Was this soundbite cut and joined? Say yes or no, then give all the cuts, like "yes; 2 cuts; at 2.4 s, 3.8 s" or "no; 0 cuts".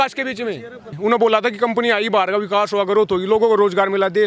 yes; 1 cut; at 0.9 s